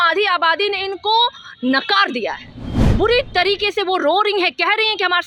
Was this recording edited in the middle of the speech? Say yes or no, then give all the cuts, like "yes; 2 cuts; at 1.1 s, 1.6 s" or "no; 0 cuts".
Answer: no; 0 cuts